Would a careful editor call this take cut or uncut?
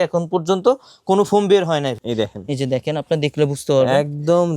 cut